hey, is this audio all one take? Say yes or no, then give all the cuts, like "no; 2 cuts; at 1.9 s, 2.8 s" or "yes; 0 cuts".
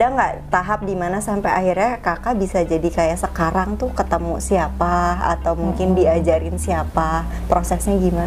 yes; 0 cuts